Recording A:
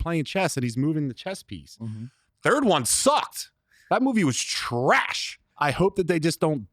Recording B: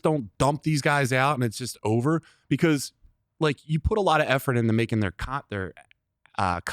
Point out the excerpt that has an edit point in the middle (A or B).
A